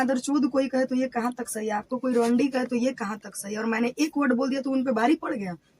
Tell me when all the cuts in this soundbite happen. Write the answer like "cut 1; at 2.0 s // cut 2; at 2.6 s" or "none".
none